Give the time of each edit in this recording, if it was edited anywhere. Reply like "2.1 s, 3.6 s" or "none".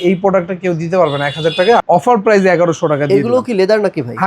1.8 s